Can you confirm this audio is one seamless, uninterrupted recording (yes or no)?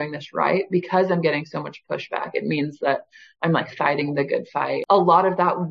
no